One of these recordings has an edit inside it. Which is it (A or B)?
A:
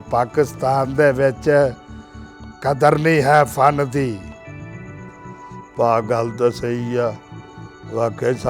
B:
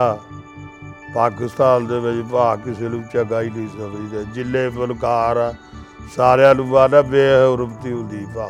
A